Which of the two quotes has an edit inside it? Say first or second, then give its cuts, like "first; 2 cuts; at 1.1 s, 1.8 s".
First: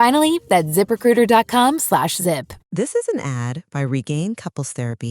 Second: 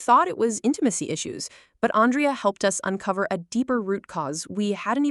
first; 1 cut; at 2.6 s